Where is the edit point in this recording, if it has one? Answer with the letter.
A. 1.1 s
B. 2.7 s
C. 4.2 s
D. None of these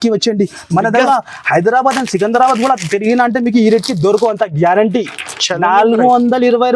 A